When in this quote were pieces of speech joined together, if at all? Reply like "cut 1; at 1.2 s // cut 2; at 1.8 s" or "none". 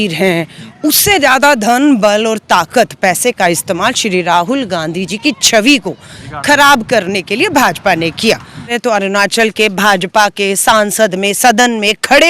cut 1; at 8.7 s